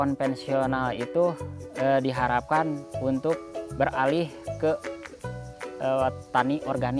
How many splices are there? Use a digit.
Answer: 1